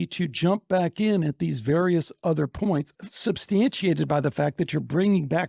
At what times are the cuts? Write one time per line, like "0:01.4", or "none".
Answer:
0:03.0